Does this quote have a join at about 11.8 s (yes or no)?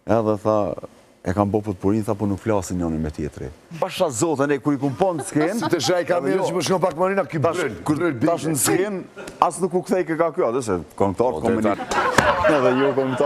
yes